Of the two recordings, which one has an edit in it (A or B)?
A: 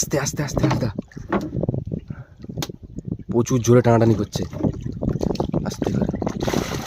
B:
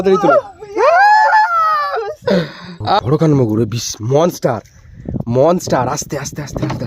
B